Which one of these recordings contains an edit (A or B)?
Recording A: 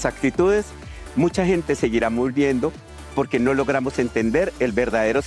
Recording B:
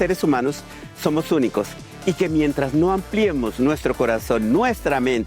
B